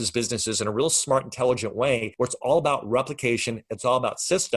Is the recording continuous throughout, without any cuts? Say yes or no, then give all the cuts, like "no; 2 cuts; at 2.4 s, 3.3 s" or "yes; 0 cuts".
no; 1 cut; at 2.1 s